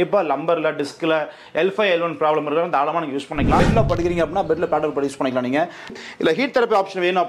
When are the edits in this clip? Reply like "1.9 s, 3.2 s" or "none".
3.6 s, 5.9 s